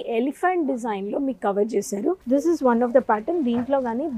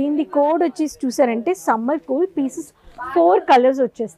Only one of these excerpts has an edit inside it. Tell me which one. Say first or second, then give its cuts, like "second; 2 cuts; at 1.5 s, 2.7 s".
first; 1 cut; at 2.2 s